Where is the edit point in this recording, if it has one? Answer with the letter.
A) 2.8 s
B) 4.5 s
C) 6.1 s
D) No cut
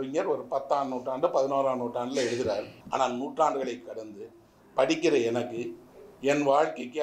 A